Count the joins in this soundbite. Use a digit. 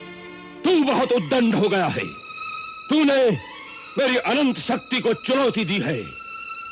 0